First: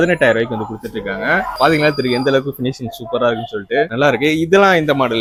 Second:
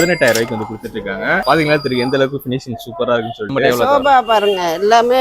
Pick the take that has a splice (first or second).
second